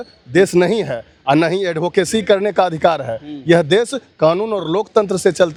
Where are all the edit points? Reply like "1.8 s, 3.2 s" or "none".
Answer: none